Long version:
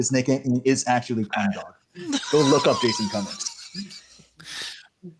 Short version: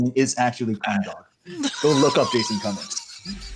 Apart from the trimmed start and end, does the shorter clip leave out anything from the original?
no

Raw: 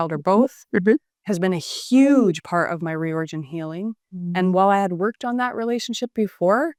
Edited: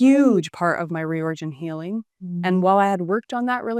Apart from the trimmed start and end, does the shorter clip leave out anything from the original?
no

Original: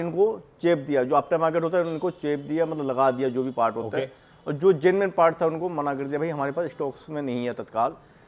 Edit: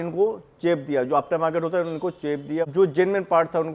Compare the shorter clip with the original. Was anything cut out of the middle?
yes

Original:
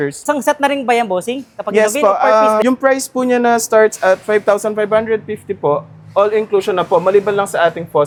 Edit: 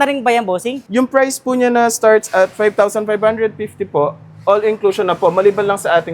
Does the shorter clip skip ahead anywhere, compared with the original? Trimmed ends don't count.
yes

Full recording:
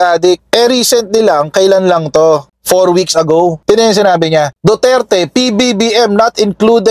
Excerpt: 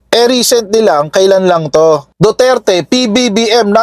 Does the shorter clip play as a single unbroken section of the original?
no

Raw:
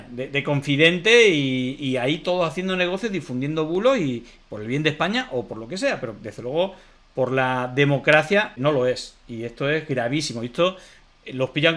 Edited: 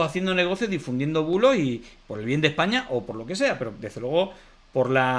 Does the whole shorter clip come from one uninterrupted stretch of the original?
yes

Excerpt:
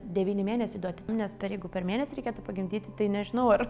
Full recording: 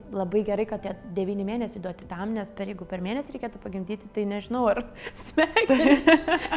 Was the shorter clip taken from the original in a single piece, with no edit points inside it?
no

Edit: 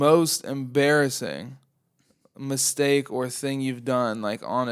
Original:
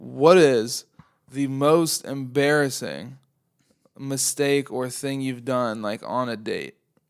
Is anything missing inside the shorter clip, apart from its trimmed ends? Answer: no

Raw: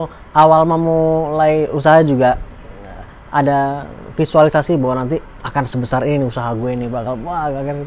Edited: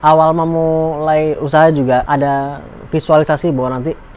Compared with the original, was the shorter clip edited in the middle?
yes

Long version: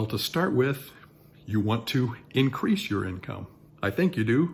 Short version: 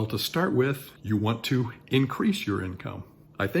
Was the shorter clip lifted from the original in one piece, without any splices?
no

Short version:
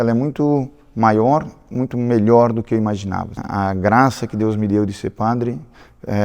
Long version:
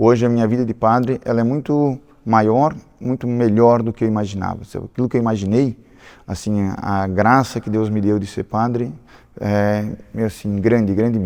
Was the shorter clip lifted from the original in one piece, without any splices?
no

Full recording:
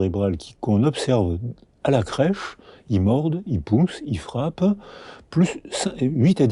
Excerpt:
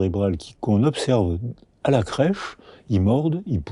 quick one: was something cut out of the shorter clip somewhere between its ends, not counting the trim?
no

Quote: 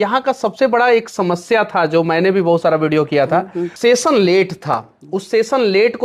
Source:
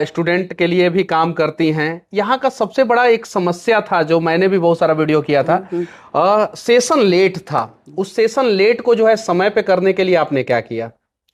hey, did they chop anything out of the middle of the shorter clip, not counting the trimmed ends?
yes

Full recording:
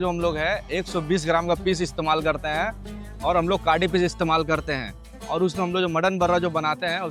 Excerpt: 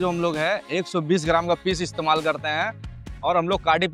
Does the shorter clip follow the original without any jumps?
yes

